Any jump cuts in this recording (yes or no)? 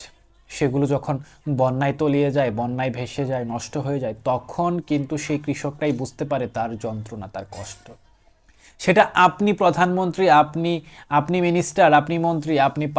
no